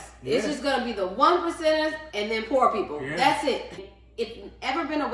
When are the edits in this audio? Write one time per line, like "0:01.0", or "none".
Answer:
0:03.8